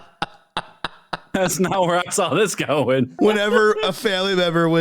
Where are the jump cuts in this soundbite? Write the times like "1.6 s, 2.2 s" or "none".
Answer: 3.1 s